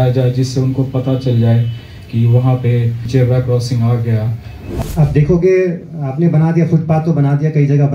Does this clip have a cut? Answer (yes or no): yes